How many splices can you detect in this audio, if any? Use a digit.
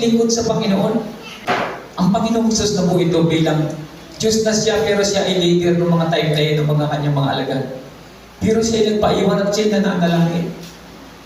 1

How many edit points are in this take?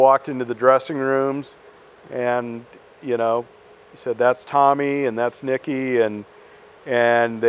0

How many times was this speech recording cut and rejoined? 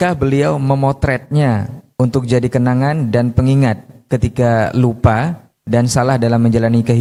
0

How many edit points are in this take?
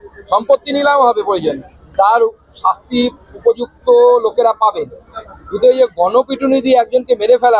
1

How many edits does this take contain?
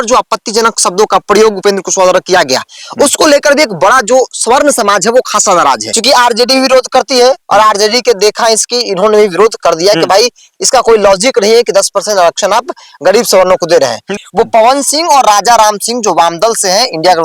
2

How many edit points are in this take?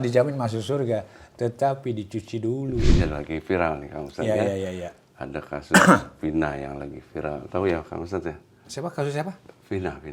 1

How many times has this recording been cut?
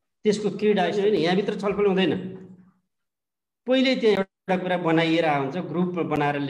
1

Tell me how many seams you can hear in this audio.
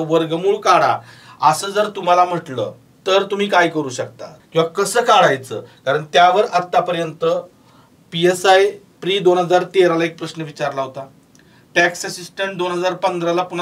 2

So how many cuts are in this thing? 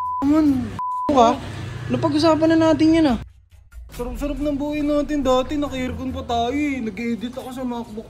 1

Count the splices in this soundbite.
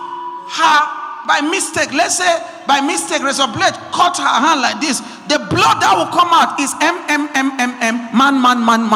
0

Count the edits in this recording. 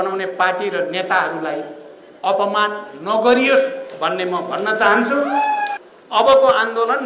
1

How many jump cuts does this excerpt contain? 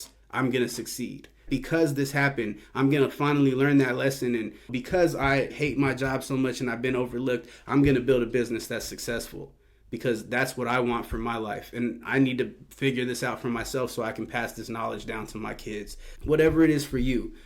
0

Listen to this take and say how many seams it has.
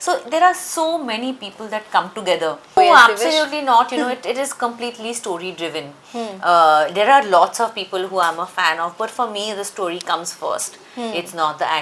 1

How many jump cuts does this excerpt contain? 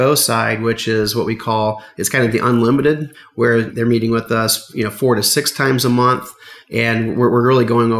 1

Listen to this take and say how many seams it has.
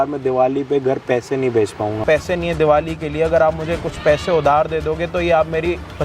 1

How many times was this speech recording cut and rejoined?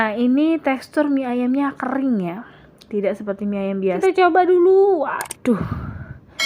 1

